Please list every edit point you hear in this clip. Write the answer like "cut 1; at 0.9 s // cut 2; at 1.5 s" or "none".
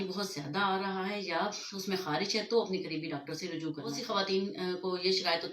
cut 1; at 4.0 s